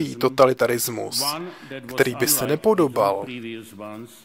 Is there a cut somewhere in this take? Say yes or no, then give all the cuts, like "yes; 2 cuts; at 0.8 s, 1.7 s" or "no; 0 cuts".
no; 0 cuts